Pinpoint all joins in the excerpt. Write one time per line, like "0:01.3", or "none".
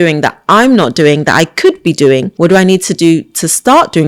0:02.3